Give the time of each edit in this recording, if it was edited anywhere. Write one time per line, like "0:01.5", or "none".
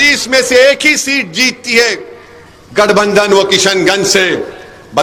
none